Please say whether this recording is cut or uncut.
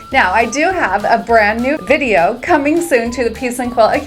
cut